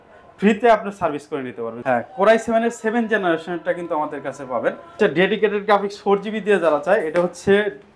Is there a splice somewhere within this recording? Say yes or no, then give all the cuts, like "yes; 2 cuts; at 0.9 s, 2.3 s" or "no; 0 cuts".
yes; 2 cuts; at 1.7 s, 5.0 s